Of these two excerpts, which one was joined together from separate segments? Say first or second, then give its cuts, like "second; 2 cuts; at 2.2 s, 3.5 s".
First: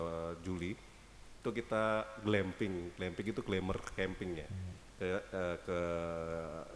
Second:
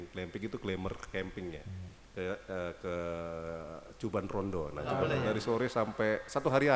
second; 1 cut; at 5.2 s